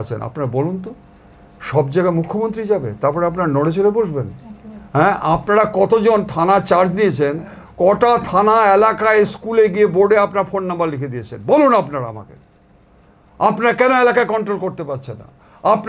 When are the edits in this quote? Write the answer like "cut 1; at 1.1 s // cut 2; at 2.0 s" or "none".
none